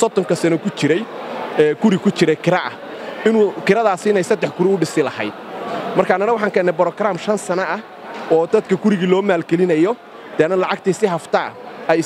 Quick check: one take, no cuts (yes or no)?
yes